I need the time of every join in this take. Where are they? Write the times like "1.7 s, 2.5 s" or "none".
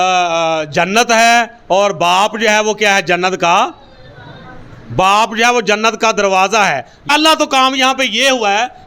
7.1 s